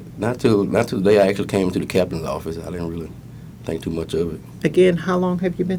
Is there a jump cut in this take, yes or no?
yes